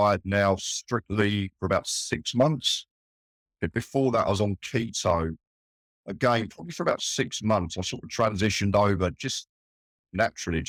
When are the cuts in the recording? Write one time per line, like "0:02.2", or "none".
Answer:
none